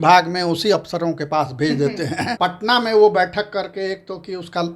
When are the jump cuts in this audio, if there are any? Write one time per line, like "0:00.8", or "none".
0:02.3